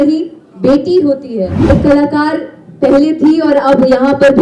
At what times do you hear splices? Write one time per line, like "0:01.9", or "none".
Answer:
0:01.6